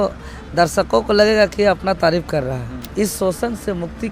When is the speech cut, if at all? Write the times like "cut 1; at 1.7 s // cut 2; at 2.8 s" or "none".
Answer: cut 1; at 2.8 s